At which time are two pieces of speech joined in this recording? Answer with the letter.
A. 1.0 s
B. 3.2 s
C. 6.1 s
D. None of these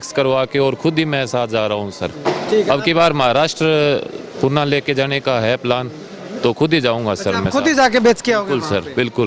D